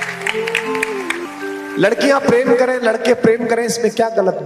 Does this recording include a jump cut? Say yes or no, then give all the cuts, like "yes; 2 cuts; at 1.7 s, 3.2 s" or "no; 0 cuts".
yes; 1 cut; at 1.3 s